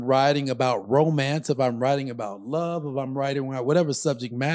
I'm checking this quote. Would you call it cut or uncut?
uncut